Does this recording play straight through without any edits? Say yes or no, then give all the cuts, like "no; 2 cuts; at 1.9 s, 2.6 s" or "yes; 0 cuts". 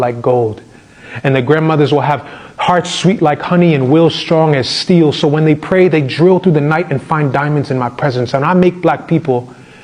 yes; 0 cuts